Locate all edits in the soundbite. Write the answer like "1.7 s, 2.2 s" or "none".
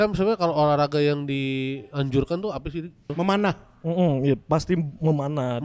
3.1 s